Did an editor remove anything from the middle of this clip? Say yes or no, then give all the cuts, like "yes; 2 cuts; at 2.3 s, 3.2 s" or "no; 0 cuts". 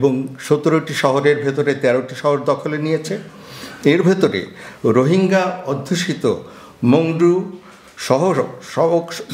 no; 0 cuts